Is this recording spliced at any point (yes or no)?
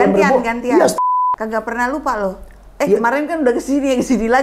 yes